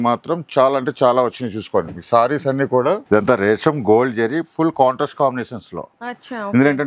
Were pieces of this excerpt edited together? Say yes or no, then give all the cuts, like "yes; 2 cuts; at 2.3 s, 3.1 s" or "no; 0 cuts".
yes; 1 cut; at 3.0 s